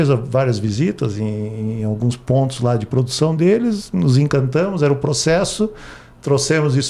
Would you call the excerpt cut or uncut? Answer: uncut